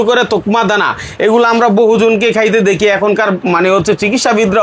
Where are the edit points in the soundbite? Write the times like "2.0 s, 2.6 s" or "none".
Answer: none

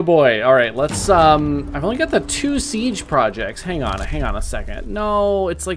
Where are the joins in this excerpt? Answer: none

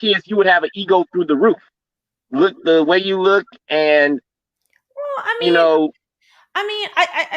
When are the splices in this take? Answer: 2.5 s

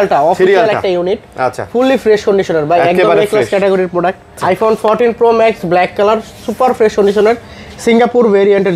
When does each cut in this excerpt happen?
4.4 s

